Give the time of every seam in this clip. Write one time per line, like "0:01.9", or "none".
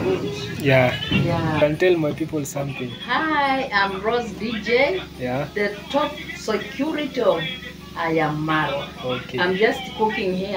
0:01.6